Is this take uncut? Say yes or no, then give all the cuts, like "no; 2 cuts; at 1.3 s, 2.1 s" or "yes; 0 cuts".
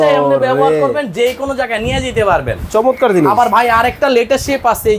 yes; 0 cuts